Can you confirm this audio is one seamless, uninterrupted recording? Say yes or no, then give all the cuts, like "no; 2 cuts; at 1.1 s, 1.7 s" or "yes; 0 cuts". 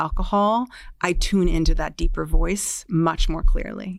yes; 0 cuts